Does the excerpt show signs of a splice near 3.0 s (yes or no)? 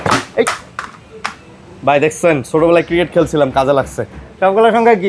no